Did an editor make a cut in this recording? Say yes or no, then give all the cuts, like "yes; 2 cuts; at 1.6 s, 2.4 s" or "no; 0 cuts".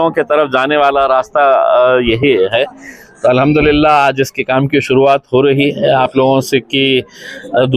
no; 0 cuts